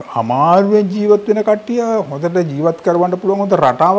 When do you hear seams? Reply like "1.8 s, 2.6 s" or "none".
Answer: none